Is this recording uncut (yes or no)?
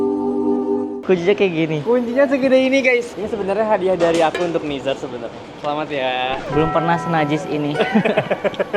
yes